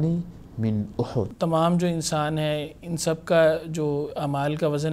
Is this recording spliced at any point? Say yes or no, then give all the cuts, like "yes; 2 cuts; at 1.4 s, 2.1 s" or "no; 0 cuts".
yes; 1 cut; at 1.3 s